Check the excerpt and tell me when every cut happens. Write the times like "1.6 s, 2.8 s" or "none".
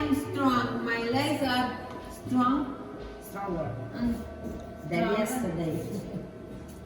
none